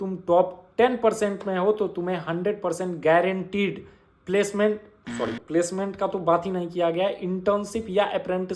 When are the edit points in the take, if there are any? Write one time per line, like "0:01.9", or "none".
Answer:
none